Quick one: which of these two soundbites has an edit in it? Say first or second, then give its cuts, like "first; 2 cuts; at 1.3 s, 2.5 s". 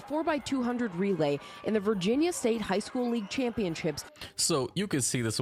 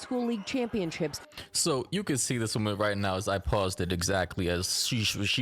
second; 1 cut; at 4.3 s